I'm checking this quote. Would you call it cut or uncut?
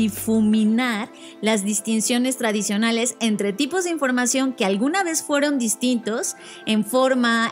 uncut